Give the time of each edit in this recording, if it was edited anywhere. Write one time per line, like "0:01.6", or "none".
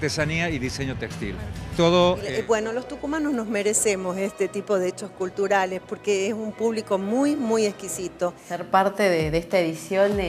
0:02.3
0:08.5

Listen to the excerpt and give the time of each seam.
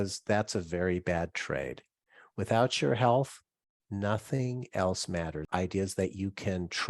0:05.4

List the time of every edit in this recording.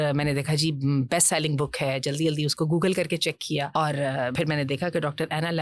0:03.7
0:04.3

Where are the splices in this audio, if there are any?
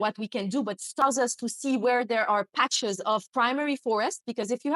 0:01.0

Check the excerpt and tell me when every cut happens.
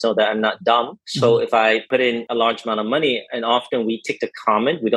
0:01.0
0:01.9

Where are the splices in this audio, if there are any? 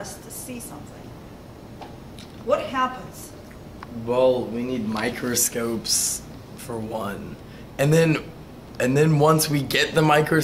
0:06.0

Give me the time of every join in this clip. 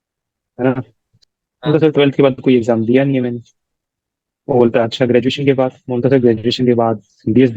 0:01.3

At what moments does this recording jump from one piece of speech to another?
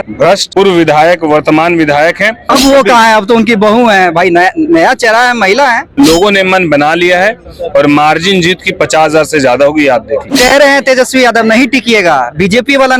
0:02.4
0:05.9
0:10.3

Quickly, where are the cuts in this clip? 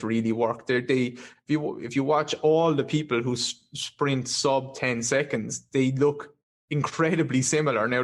none

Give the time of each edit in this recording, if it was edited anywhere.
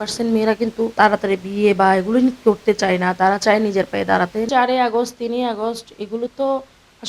0:00.9
0:04.5

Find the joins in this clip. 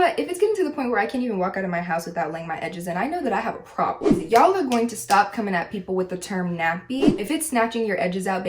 0:04.1
0:07.1

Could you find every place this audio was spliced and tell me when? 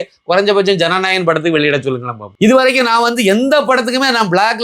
0:02.2

